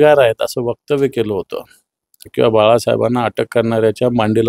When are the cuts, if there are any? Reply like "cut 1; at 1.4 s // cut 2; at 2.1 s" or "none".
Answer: cut 1; at 2.3 s